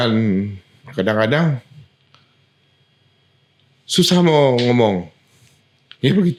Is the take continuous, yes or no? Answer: yes